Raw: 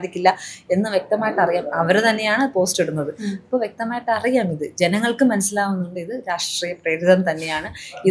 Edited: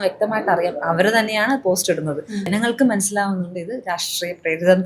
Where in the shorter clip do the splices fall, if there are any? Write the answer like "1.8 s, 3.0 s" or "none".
2.5 s